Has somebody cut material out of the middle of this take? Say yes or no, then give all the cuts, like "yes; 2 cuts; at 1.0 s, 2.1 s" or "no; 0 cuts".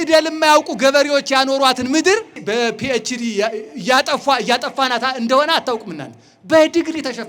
yes; 1 cut; at 2.3 s